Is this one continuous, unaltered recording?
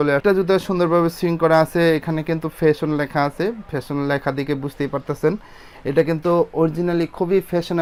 yes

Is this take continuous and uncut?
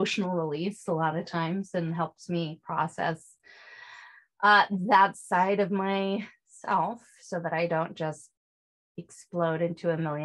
yes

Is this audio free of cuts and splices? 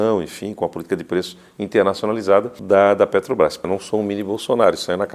no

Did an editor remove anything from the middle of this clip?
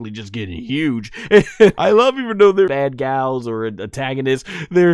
yes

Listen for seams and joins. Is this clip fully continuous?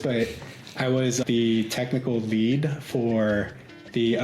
no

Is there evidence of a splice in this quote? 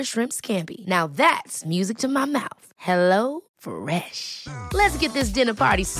no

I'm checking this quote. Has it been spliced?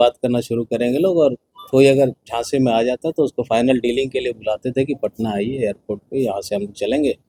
no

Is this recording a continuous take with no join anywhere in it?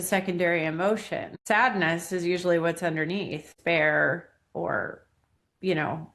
no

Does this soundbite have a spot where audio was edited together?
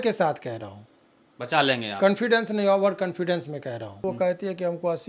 yes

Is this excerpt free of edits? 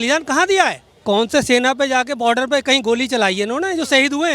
no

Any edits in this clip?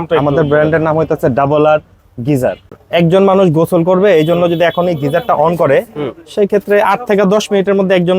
yes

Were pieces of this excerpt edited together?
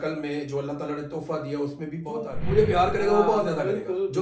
yes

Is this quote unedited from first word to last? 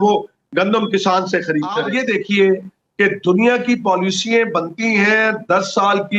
no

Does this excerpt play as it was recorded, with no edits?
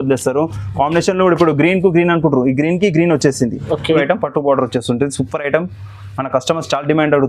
no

